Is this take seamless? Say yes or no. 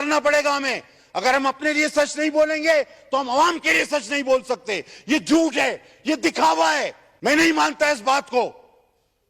no